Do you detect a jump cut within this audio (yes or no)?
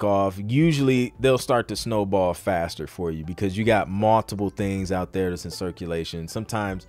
no